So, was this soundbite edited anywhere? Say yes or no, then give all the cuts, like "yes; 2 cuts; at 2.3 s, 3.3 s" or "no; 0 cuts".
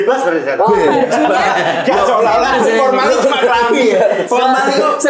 no; 0 cuts